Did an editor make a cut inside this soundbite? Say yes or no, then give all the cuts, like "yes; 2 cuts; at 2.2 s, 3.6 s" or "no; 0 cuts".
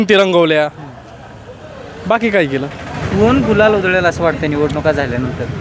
yes; 1 cut; at 3.0 s